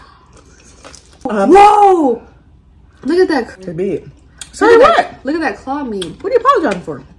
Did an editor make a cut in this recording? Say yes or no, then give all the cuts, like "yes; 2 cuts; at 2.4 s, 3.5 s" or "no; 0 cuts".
yes; 2 cuts; at 1.2 s, 3.6 s